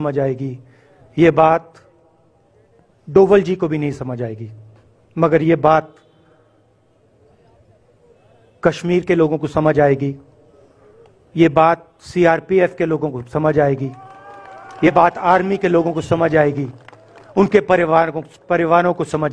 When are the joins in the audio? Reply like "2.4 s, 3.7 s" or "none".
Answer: none